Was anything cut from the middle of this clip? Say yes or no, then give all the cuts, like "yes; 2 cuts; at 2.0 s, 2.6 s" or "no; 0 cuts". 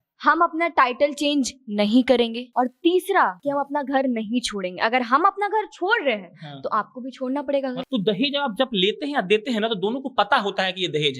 yes; 2 cuts; at 2.4 s, 7.8 s